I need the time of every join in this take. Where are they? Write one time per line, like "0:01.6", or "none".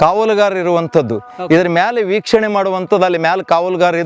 none